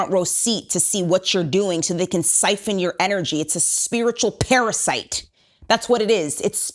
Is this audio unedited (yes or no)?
yes